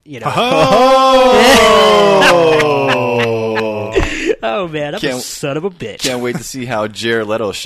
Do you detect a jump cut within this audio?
no; 0 cuts

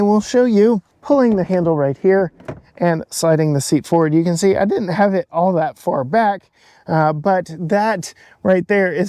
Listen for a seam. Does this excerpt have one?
yes; 1 cut; at 0.9 s

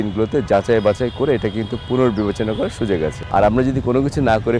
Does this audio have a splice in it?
yes; 1 cut; at 3.2 s

